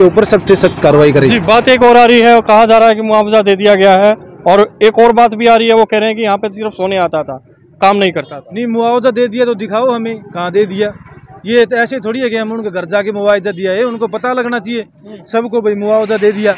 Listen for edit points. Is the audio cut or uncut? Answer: uncut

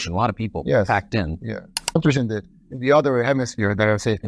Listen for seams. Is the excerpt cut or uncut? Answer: cut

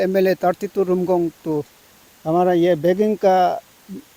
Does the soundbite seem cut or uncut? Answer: uncut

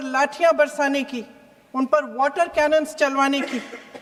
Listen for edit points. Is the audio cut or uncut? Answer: uncut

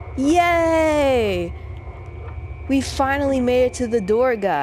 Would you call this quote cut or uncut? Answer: uncut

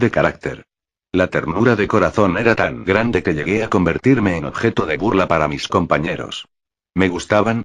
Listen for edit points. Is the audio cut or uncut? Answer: cut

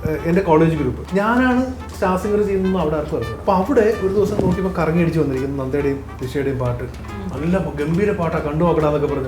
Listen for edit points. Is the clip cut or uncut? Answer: cut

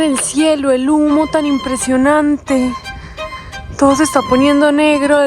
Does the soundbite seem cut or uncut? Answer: uncut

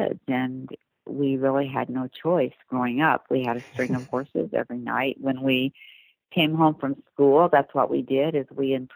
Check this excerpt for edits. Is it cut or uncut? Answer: uncut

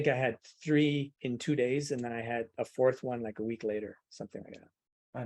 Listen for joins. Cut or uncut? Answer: cut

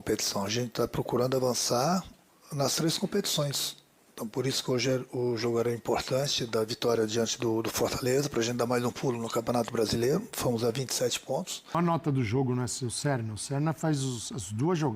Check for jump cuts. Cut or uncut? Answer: cut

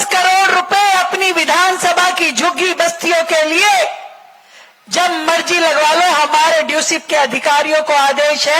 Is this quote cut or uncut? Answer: uncut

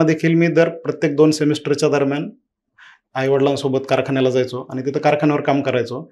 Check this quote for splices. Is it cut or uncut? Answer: uncut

